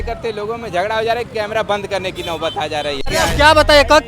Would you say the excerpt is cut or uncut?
cut